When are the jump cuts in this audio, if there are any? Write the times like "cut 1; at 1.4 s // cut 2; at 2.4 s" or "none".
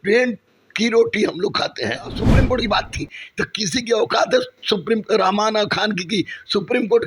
cut 1; at 2.2 s